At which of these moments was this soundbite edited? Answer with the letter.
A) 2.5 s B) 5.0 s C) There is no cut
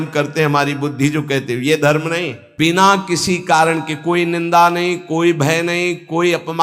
A